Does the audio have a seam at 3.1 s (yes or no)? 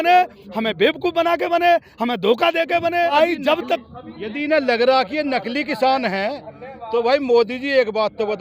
yes